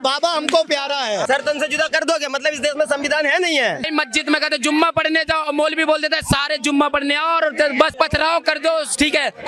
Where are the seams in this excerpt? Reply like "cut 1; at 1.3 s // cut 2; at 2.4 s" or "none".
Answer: cut 1; at 1.2 s // cut 2; at 3.9 s // cut 3; at 7.9 s